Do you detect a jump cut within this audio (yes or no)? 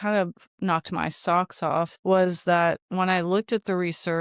yes